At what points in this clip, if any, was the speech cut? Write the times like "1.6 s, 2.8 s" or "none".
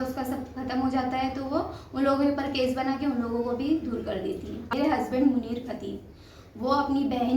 4.6 s